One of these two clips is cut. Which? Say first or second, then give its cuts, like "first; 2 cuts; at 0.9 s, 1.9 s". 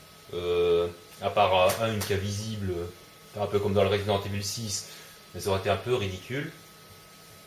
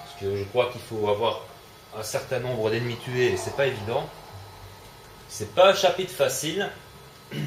first; 1 cut; at 5.3 s